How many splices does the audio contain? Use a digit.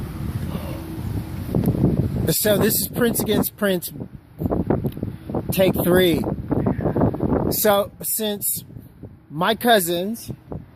1